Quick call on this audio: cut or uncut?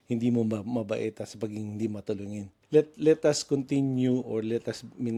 uncut